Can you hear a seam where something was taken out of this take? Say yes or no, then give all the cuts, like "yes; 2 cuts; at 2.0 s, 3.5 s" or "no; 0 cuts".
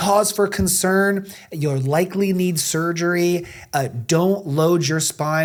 no; 0 cuts